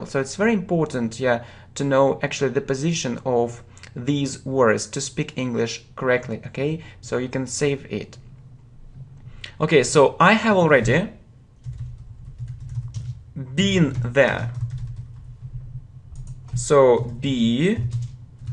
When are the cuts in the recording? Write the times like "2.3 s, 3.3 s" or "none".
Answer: 7.3 s